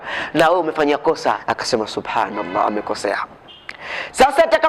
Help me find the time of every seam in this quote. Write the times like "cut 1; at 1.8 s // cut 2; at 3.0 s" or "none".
cut 1; at 1.4 s

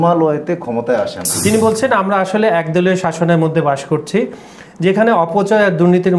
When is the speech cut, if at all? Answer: cut 1; at 1.2 s

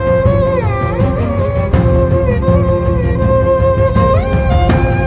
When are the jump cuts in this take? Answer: none

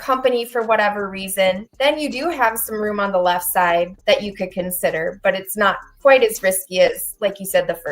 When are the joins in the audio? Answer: cut 1; at 4.0 s

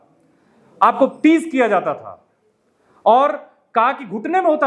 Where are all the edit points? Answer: none

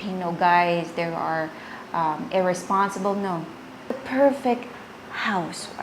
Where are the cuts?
cut 1; at 4.0 s

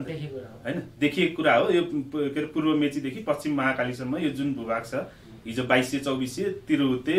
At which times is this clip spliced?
none

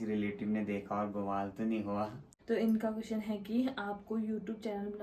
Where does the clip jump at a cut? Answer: cut 1; at 2.3 s

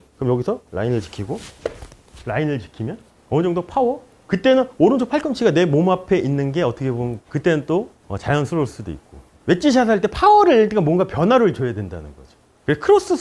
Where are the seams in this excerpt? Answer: none

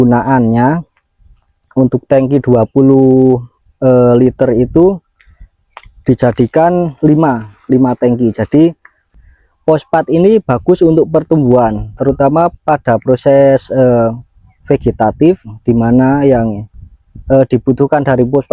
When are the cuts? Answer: cut 1; at 9.0 s

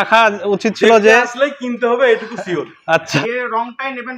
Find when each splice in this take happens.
cut 1; at 2.8 s

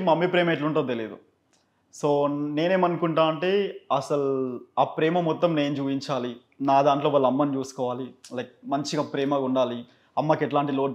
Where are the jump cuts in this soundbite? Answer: none

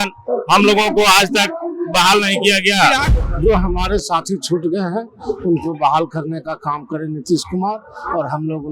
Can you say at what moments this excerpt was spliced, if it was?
cut 1; at 3.1 s

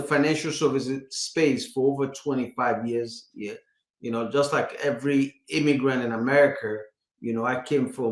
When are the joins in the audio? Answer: none

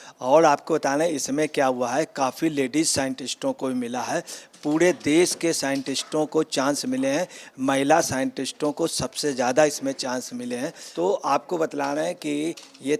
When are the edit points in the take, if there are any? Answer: cut 1; at 10.8 s

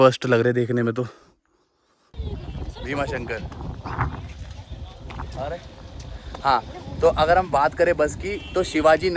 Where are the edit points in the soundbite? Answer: cut 1; at 2.2 s

